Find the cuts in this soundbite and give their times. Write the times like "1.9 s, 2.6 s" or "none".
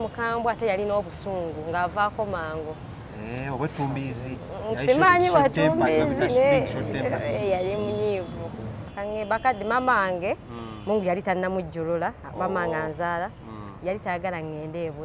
8.8 s